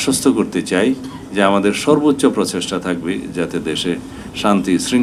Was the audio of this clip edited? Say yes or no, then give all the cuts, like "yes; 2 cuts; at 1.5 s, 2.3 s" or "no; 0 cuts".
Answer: no; 0 cuts